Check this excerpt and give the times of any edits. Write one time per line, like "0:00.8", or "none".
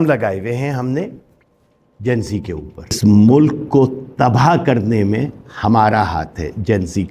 0:03.0